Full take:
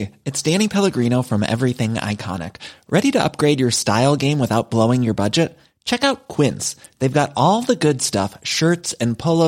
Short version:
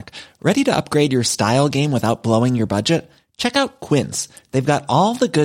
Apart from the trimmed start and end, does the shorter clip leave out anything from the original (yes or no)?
no